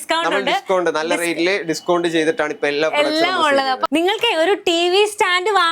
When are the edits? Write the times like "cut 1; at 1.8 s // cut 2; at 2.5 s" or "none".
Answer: cut 1; at 3.8 s